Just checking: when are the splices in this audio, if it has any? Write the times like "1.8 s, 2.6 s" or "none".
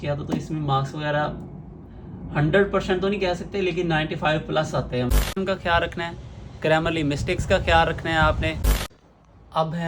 5.3 s, 8.9 s